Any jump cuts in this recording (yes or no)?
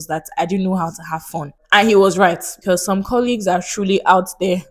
yes